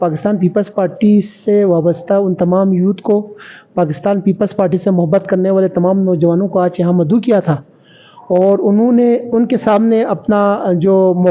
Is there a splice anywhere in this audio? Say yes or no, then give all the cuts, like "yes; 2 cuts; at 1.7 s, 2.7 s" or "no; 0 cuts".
no; 0 cuts